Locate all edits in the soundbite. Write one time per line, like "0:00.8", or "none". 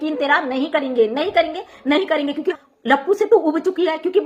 0:02.6